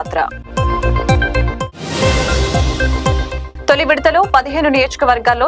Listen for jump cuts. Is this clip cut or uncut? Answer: uncut